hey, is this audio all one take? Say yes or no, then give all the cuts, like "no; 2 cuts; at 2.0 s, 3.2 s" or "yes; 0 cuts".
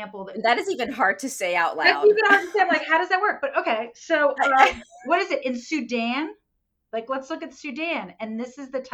yes; 0 cuts